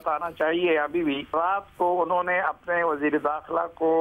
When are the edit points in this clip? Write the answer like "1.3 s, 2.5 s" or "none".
1.3 s